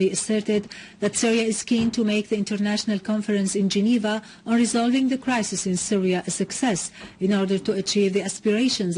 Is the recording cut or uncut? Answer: cut